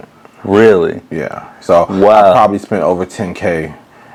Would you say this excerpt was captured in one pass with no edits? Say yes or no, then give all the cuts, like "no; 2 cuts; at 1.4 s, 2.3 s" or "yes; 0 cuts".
yes; 0 cuts